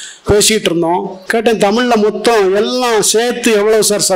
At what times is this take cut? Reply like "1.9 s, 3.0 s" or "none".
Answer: 1.2 s